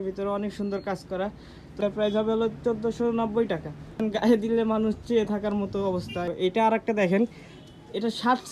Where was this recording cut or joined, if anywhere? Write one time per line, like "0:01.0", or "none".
0:01.8
0:03.9
0:06.3